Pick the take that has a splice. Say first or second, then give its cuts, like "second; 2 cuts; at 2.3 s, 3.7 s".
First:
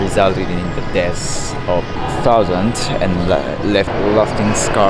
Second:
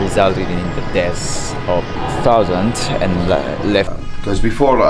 second; 1 cut; at 3.9 s